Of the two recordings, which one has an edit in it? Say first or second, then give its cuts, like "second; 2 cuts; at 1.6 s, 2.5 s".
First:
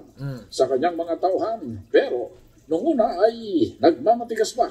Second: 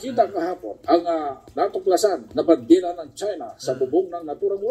second; 1 cut; at 2.3 s